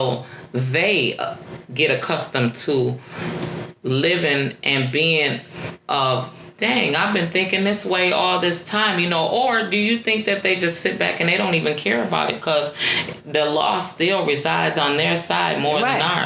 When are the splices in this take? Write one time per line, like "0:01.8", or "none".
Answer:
none